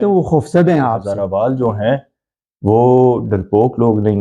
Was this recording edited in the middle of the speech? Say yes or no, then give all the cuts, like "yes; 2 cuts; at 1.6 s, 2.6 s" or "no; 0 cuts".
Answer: yes; 1 cut; at 1.1 s